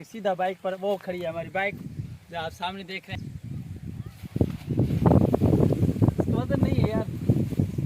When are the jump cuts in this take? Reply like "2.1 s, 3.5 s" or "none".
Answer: 3.1 s